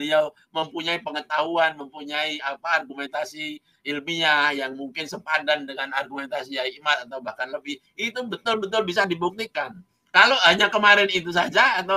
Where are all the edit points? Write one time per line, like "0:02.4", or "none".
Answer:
none